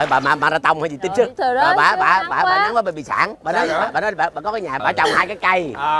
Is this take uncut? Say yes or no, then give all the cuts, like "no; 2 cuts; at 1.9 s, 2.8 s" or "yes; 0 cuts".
no; 1 cut; at 1.3 s